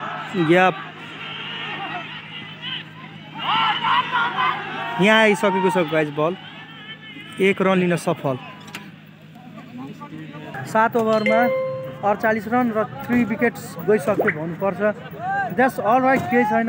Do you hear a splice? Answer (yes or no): no